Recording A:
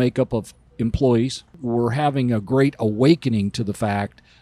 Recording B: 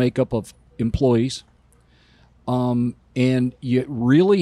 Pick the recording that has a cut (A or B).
A